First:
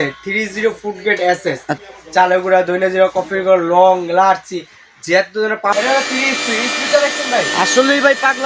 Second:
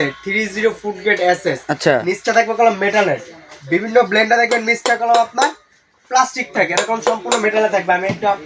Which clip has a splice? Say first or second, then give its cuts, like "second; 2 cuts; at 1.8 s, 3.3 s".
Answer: first; 2 cuts; at 1.8 s, 5.7 s